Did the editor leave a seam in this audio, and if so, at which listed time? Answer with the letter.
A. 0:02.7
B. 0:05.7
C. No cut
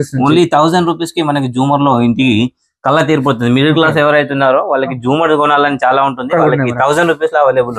C